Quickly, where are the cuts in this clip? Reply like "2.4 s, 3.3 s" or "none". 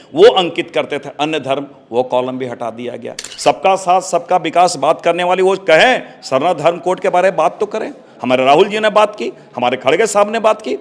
3.3 s